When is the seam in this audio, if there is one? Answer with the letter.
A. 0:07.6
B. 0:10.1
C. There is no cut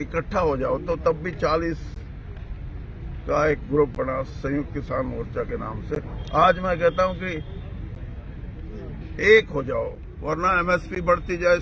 B